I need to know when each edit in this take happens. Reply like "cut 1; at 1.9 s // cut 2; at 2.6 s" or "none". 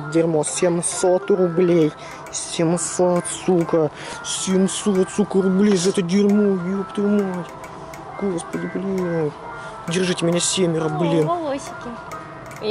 none